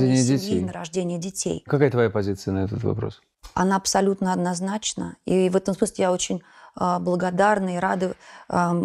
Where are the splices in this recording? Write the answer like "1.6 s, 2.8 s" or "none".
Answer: none